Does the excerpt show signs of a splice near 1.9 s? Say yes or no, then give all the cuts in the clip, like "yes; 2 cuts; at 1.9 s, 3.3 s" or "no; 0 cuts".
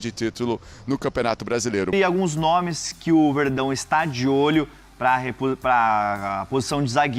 yes; 1 cut; at 1.9 s